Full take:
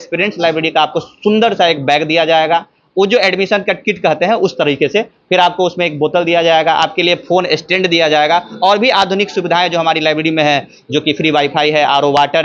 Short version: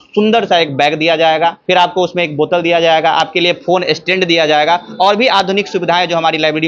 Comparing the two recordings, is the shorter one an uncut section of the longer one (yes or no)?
no